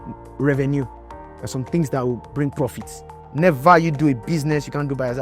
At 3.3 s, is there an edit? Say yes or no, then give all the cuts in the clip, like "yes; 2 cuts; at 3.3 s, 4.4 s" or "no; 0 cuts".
yes; 1 cut; at 3.3 s